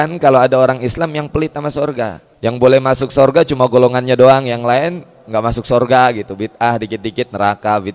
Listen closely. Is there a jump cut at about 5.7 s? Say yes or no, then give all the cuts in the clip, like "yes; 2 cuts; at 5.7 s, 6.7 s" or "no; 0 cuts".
no; 1 cut; at 2.2 s